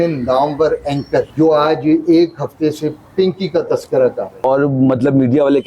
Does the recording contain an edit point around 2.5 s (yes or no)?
no